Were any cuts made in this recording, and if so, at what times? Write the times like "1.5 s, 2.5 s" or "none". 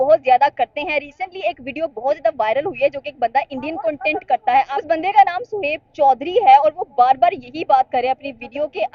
4.8 s